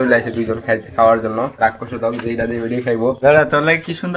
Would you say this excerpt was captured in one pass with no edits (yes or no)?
no